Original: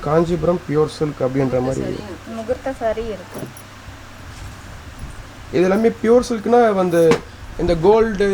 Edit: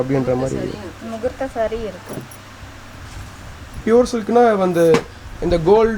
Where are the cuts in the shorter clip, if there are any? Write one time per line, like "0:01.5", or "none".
0:03.8